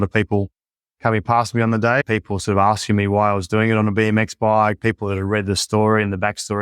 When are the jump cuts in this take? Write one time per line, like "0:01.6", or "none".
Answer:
0:02.0